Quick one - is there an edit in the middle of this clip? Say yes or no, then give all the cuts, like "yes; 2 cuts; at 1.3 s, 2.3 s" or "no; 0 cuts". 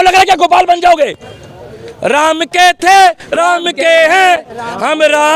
no; 0 cuts